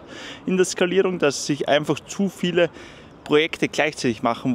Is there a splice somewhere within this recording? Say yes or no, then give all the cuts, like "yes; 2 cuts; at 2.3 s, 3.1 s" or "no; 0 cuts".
no; 0 cuts